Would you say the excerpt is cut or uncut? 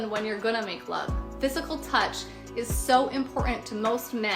cut